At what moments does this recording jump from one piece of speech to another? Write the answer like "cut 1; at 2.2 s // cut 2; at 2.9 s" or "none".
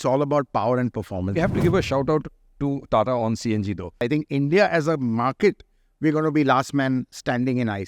cut 1; at 1.4 s // cut 2; at 4.0 s